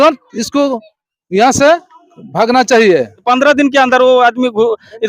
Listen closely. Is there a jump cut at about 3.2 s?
yes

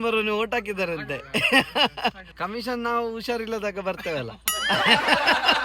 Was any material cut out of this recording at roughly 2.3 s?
yes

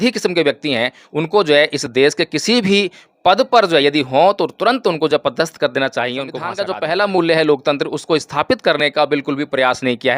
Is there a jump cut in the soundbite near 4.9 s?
no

